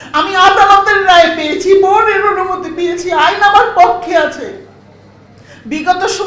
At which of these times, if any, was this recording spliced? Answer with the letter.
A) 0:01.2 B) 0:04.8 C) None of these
C